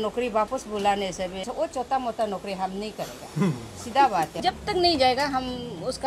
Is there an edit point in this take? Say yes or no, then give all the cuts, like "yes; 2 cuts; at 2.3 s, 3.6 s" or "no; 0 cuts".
yes; 2 cuts; at 1.5 s, 4.3 s